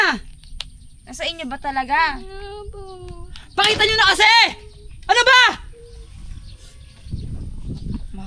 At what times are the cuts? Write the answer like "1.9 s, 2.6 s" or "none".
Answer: none